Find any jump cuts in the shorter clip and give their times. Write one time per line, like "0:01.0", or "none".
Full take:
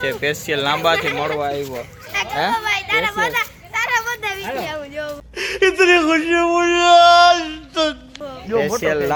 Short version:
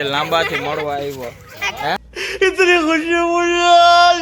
0:02.0